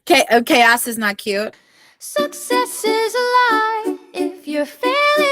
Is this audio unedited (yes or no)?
no